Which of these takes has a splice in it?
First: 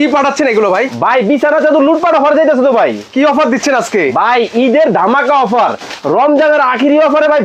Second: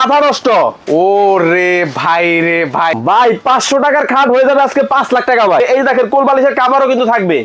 second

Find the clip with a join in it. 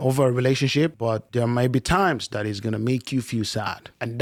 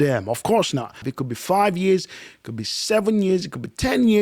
second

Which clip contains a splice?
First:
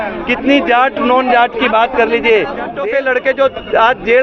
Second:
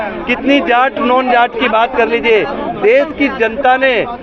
first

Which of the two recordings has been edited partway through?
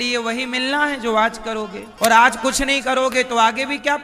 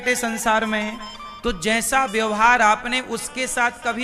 first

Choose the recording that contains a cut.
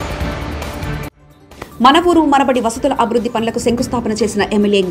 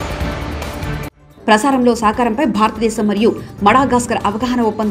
second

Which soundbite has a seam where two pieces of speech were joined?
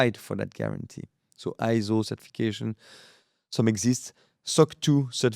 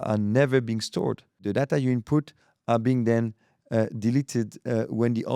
second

